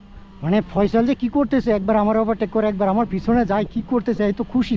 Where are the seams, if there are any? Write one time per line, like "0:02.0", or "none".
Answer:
none